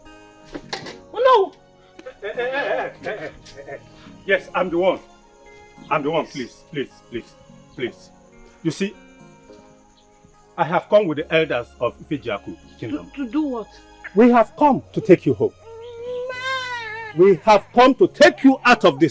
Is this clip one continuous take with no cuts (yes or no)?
yes